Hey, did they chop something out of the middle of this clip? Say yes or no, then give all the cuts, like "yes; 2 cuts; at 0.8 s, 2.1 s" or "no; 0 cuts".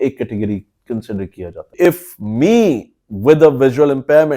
yes; 1 cut; at 1.7 s